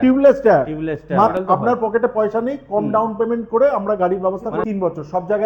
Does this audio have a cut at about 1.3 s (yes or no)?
yes